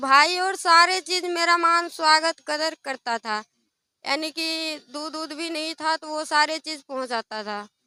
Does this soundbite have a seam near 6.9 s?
no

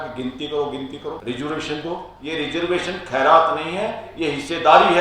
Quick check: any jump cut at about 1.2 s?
yes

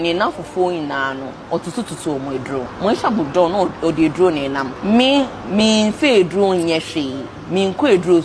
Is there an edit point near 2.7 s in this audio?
yes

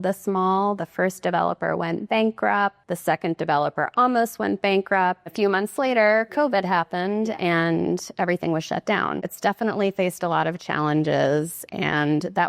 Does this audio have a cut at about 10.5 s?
no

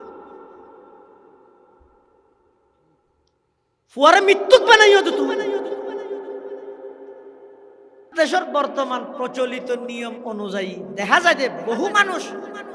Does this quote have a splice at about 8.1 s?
yes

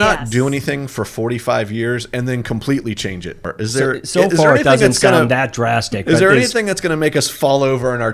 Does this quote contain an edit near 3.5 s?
yes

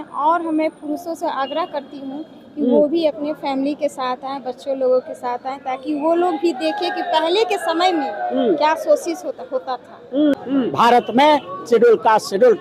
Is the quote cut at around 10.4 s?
yes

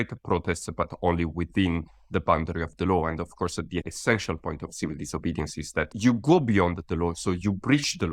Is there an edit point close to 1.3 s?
no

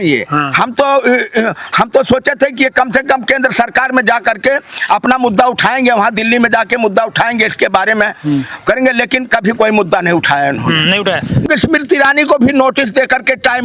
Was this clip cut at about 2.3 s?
no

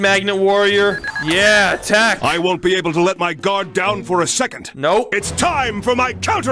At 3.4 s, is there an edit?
no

